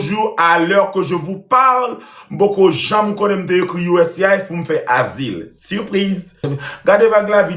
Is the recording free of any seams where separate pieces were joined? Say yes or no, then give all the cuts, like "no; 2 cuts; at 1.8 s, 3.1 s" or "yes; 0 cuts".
no; 1 cut; at 6.5 s